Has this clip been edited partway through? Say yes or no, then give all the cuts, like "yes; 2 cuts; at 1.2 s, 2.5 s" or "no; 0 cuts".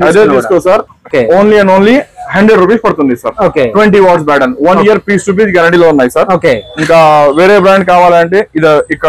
no; 0 cuts